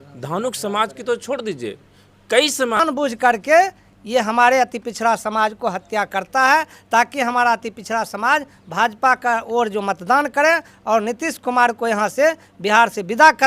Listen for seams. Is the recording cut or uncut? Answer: cut